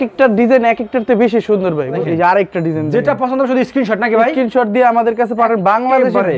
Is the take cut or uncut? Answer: cut